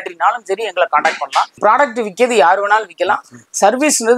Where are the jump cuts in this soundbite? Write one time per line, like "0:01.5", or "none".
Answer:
0:01.6